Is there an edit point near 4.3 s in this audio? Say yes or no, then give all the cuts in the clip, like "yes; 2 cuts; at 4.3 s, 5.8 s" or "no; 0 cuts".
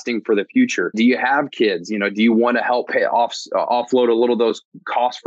no; 2 cuts; at 0.9 s, 2.9 s